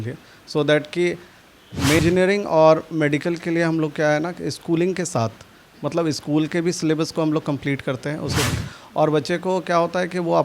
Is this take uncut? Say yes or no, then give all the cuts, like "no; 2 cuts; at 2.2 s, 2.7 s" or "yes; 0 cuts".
no; 2 cuts; at 2.0 s, 8.5 s